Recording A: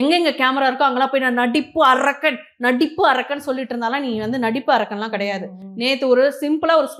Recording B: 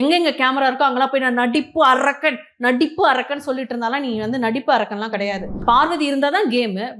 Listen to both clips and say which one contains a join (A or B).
B